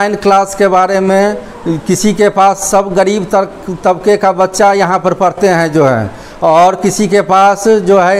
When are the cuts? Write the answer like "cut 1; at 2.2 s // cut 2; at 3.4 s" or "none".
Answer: none